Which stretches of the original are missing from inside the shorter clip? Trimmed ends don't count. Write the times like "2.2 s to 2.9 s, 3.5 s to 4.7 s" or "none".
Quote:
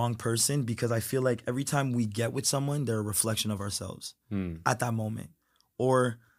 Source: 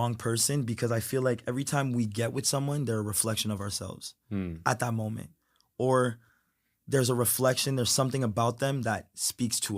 none